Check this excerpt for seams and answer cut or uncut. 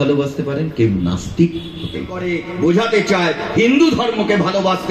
cut